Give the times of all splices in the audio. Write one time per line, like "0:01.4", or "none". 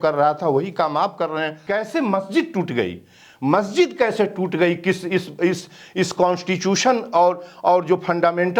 0:01.6